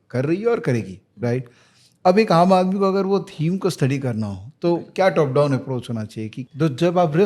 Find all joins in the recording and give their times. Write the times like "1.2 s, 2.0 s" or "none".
6.4 s